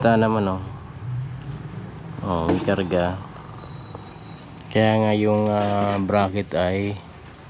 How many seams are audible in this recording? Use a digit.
0